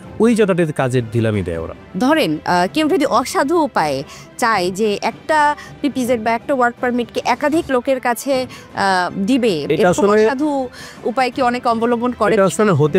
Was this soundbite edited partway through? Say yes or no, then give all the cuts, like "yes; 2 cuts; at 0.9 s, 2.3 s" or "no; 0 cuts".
yes; 2 cuts; at 1.8 s, 9.6 s